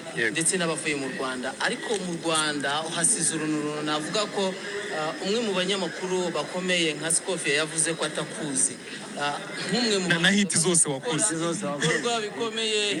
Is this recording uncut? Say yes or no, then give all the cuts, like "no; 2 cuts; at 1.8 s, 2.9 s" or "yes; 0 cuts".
yes; 0 cuts